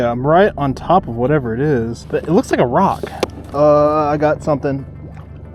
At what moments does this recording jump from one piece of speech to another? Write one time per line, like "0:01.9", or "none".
0:02.0
0:03.4